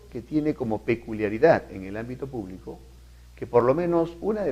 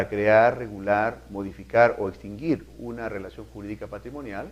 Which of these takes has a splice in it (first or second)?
first